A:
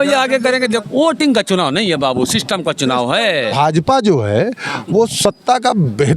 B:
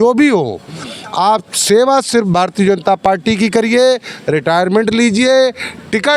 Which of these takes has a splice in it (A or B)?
A